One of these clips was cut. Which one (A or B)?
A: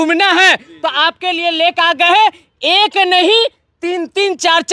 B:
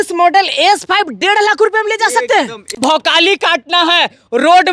B